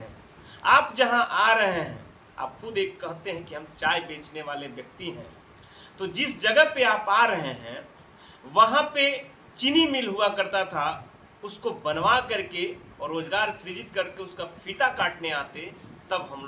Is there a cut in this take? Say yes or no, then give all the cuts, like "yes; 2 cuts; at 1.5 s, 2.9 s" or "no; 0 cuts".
no; 0 cuts